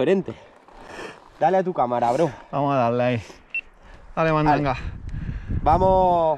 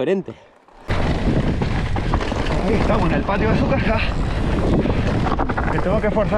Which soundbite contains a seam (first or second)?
second